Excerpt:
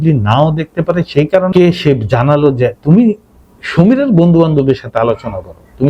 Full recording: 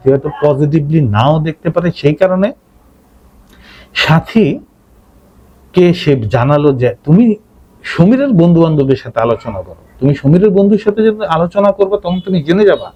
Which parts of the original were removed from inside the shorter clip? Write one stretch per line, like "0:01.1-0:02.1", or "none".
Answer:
0:02.4-0:05.7